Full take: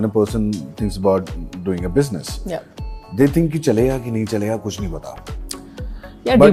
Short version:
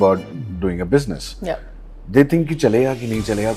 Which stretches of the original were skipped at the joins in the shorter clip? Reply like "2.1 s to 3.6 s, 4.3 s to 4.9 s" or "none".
none